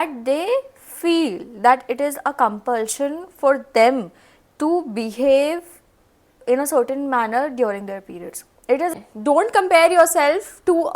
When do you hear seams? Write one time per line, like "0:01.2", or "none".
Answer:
0:08.9